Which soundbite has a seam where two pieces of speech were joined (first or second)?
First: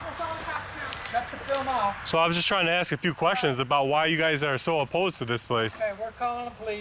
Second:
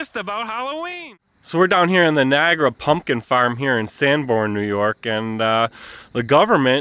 second